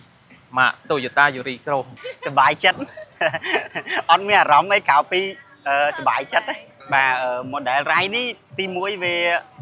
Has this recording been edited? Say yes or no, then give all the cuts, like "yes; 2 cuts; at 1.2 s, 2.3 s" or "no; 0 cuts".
yes; 1 cut; at 2.0 s